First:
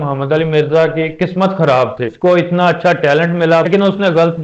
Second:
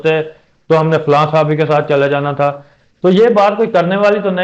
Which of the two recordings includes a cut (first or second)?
first